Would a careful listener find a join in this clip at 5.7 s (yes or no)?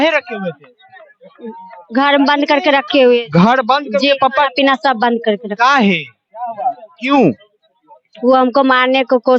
no